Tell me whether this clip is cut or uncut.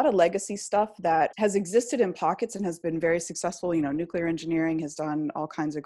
cut